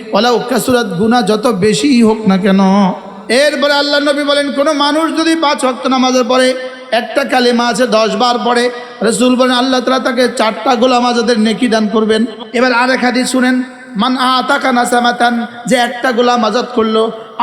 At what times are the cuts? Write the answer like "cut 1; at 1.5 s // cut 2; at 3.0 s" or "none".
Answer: cut 1; at 3.1 s // cut 2; at 12.4 s